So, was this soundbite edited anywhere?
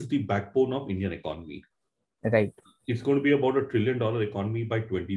no; 0 cuts

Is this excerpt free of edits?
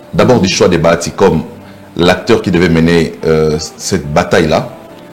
yes; 0 cuts

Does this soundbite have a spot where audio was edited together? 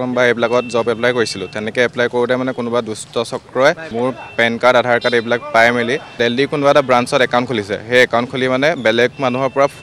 yes; 2 cuts; at 3.9 s, 6.1 s

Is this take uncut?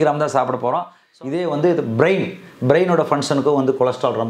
no; 1 cut; at 1.0 s

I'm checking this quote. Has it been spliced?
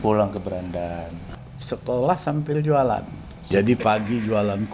yes; 2 cuts; at 1.5 s, 3.4 s

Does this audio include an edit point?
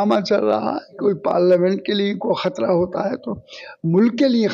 yes; 1 cut; at 0.9 s

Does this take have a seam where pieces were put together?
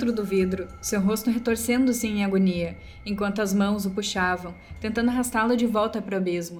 no; 0 cuts

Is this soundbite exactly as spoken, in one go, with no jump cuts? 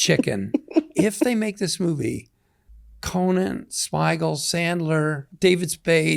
no; 2 cuts; at 1.1 s, 5.3 s

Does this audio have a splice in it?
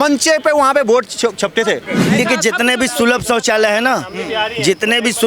yes; 1 cut; at 2.1 s

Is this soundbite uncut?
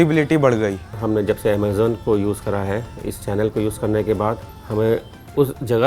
no; 1 cut; at 4.5 s

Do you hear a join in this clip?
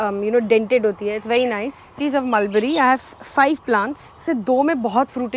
yes; 2 cuts; at 2.0 s, 4.2 s

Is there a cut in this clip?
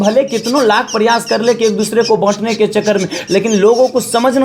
no; 0 cuts

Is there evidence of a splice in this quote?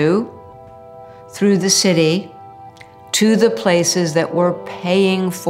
no; 0 cuts

